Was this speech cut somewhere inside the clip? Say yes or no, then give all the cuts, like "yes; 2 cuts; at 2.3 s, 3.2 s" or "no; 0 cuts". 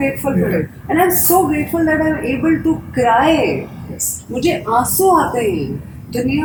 no; 0 cuts